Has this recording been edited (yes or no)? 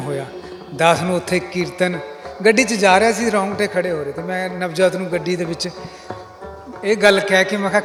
no